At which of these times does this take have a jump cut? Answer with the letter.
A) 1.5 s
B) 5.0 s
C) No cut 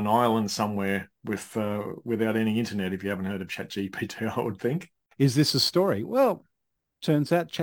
B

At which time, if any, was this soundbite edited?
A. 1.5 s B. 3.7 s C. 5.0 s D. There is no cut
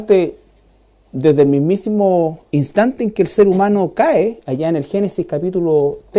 B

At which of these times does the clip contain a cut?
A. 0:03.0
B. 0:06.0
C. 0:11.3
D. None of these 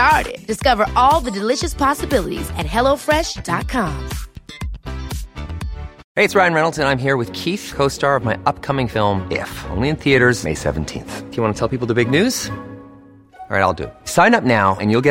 B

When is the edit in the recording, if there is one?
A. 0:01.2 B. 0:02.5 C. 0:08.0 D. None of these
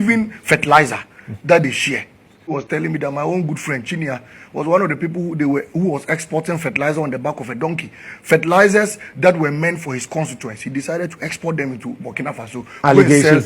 B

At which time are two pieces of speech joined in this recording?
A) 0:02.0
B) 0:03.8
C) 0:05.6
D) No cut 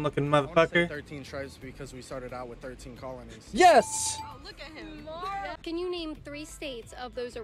C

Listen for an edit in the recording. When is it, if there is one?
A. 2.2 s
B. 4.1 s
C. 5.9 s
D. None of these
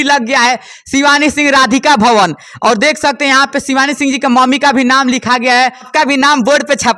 C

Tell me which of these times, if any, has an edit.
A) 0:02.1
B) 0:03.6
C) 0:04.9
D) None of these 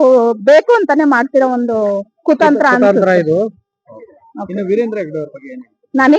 D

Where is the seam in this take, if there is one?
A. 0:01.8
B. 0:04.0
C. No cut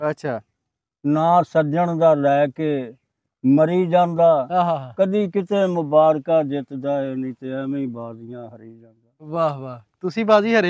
C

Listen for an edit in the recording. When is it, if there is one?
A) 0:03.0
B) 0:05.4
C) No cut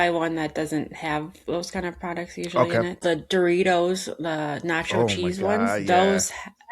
A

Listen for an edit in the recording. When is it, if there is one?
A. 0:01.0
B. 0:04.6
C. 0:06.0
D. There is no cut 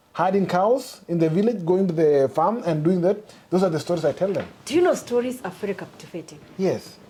D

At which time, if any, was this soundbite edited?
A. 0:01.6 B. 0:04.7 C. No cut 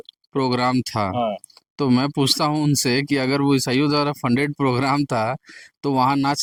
C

